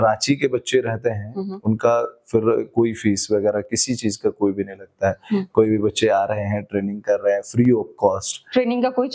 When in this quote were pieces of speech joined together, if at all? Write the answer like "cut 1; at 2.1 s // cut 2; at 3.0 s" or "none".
none